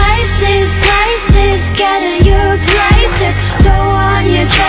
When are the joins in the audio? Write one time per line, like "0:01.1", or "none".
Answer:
0:01.1